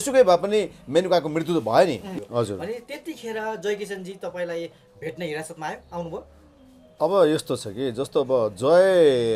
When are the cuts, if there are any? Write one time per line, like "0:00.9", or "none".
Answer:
0:02.0